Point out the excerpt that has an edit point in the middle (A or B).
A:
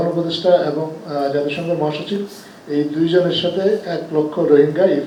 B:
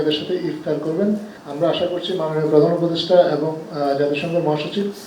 B